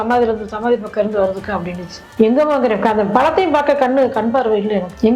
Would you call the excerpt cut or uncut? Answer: uncut